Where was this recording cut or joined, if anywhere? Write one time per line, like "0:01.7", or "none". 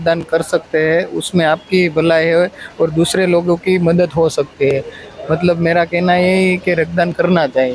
none